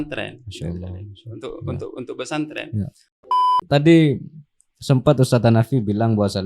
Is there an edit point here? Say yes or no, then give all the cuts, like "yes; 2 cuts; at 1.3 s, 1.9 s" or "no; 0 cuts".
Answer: yes; 1 cut; at 3.3 s